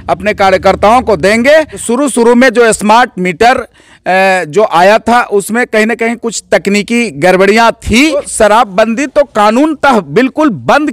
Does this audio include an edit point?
yes; 2 cuts; at 1.8 s, 8.3 s

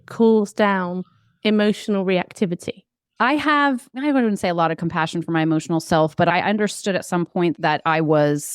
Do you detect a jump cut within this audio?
yes; 2 cuts; at 3.1 s, 3.9 s

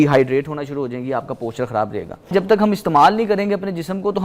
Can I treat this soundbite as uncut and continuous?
no; 1 cut; at 2.3 s

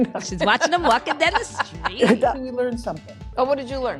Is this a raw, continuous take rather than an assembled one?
no; 1 cut; at 2.4 s

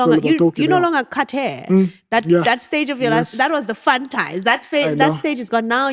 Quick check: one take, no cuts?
yes; 0 cuts

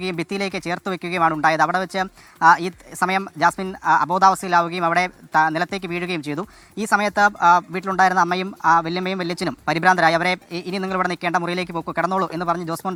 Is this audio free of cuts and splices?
yes; 0 cuts

